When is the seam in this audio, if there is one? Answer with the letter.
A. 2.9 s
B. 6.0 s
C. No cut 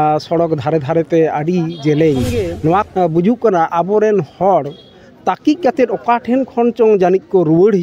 A